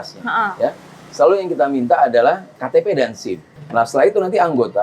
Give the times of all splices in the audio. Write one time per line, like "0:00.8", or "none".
0:02.5
0:03.5